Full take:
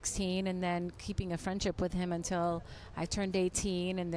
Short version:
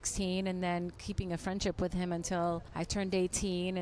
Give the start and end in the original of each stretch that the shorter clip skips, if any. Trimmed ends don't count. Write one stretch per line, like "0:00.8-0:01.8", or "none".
0:02.7-0:02.9